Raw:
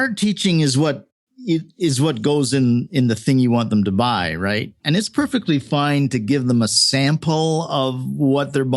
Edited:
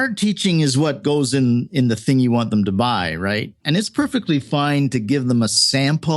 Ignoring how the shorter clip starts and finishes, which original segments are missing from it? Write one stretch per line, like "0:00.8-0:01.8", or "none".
0:01.0-0:02.2